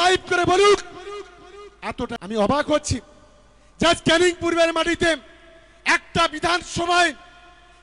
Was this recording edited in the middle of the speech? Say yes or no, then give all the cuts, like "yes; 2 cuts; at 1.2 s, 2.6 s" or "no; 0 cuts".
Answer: yes; 1 cut; at 2.2 s